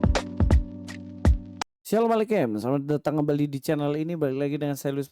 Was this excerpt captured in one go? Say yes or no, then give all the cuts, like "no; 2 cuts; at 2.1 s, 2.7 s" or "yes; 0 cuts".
yes; 0 cuts